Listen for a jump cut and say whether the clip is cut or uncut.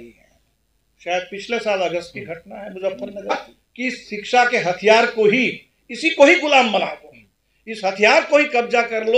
cut